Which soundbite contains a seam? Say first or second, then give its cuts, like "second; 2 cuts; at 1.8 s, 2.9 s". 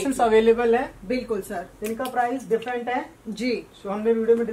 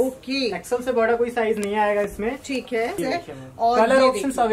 second; 1 cut; at 3.0 s